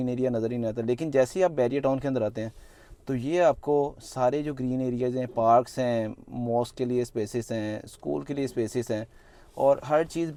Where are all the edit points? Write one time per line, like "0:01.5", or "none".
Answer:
none